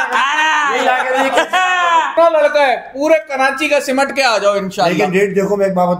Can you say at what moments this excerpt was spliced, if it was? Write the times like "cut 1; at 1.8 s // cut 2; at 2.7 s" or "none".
cut 1; at 2.1 s